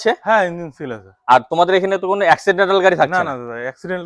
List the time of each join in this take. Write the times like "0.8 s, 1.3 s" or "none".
none